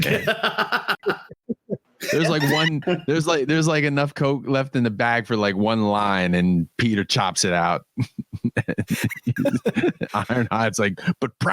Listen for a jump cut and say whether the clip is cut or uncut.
cut